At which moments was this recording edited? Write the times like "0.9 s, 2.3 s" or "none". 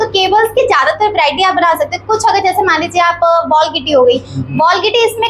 none